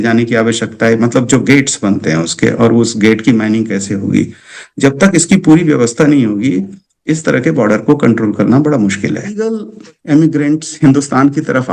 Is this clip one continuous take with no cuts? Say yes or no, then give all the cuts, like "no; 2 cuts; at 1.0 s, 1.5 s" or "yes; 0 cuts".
no; 1 cut; at 9.4 s